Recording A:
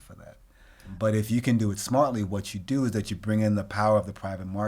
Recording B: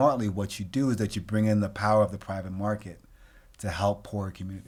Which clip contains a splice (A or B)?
A